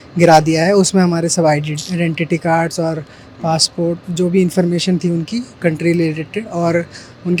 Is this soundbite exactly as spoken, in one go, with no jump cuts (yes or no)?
yes